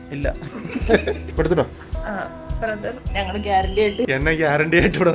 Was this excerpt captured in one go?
no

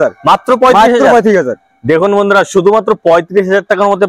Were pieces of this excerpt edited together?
no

